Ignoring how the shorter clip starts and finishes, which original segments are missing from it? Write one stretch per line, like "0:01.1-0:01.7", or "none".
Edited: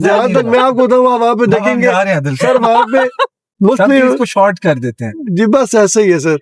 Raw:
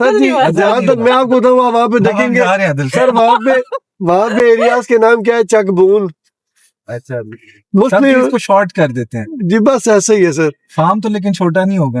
0:03.9-0:07.5

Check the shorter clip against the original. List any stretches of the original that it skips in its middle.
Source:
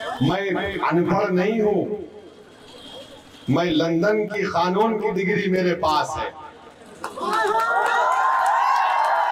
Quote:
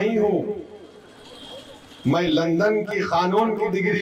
none

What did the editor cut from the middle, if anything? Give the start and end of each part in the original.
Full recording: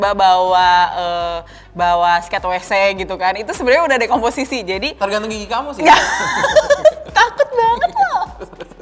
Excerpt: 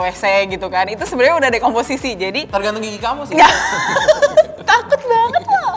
none

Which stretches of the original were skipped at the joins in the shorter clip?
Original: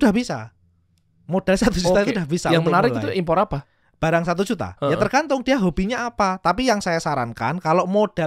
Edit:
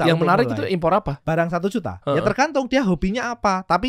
0:03.6-0:03.9

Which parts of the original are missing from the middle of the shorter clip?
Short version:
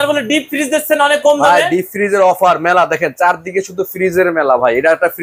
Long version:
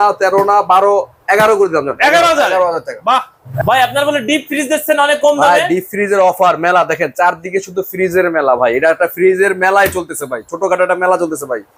none

